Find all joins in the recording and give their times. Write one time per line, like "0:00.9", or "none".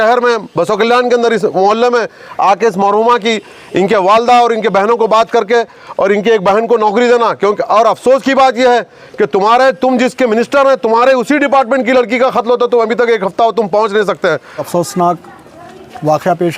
0:14.6